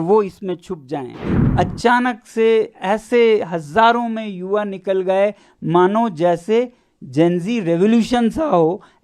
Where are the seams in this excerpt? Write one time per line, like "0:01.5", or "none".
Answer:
0:01.3